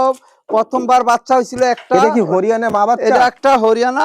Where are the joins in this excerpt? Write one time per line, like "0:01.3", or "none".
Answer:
0:01.9